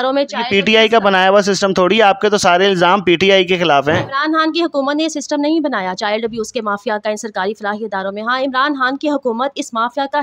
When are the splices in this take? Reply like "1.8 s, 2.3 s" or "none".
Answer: none